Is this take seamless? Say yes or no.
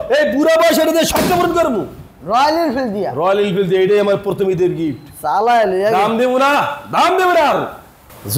yes